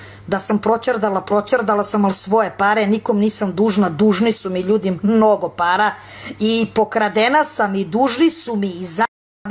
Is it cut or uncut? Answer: uncut